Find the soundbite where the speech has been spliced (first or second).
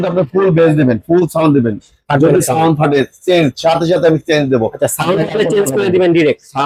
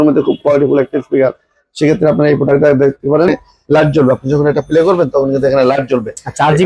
second